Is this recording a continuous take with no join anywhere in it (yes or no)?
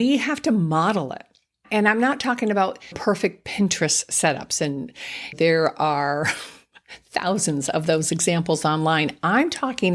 no